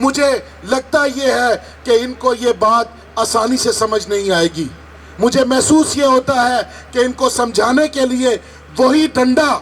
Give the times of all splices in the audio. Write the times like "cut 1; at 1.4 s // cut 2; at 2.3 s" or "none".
none